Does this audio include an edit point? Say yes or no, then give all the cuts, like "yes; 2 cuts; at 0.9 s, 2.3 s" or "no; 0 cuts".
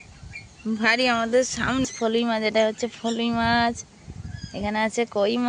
yes; 1 cut; at 1.9 s